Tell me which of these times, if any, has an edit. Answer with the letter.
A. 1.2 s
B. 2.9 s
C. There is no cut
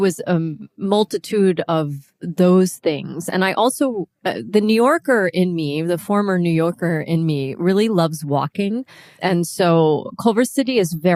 C